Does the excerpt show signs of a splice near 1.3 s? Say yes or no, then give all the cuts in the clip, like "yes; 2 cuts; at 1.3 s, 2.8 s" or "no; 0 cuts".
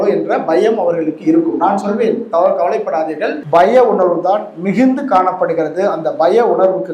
no; 1 cut; at 3.3 s